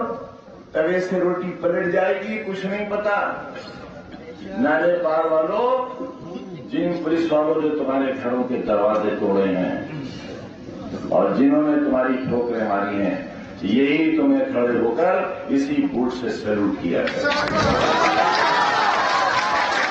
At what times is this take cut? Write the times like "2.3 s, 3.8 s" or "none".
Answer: none